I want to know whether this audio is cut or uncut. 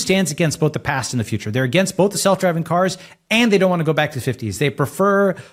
uncut